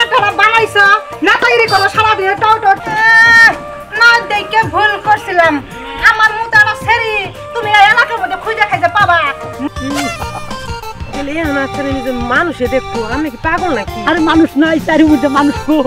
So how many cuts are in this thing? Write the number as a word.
two